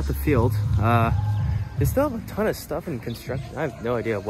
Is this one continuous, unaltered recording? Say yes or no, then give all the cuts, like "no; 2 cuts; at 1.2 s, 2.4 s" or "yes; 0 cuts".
yes; 0 cuts